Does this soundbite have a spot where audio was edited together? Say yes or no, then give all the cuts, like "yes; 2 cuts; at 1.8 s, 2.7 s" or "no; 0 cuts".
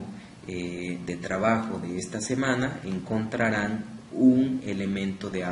yes; 1 cut; at 0.9 s